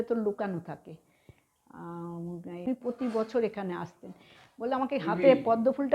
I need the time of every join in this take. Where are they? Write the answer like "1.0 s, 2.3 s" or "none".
2.7 s